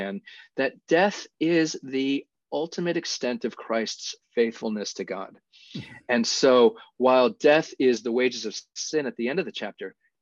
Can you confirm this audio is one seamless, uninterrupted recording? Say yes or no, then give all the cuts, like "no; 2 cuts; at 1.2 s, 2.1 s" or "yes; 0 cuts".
yes; 0 cuts